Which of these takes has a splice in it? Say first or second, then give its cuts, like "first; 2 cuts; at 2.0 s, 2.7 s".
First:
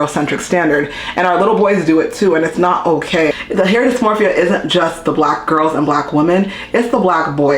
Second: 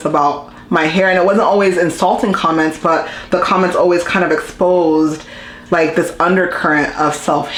first; 1 cut; at 3.3 s